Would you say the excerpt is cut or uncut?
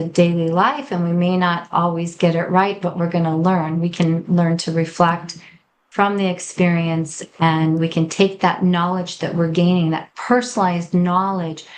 uncut